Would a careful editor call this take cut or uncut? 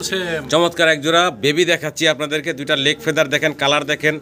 uncut